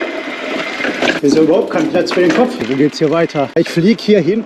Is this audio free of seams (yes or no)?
no